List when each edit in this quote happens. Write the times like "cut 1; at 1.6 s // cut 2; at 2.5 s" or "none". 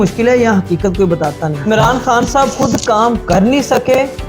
cut 1; at 1.5 s